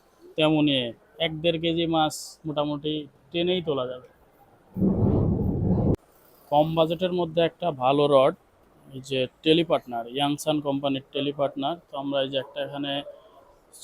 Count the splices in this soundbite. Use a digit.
1